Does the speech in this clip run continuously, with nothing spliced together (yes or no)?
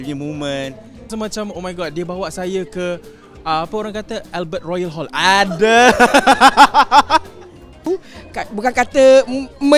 no